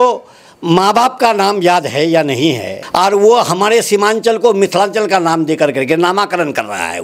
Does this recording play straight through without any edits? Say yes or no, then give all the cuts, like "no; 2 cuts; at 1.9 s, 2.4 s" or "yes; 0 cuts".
no; 1 cut; at 2.7 s